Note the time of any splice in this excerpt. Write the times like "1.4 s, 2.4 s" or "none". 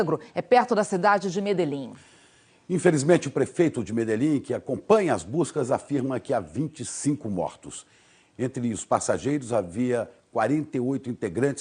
2.8 s